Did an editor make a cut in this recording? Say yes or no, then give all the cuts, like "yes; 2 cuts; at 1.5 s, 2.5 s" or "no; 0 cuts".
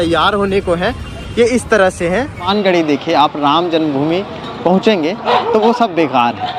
yes; 1 cut; at 2.5 s